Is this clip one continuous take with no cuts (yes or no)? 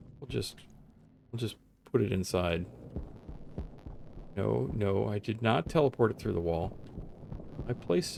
yes